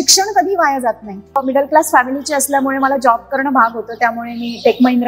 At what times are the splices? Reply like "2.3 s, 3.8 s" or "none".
1.2 s